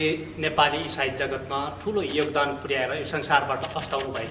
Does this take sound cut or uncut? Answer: uncut